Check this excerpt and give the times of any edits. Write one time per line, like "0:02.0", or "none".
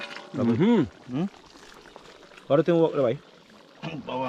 none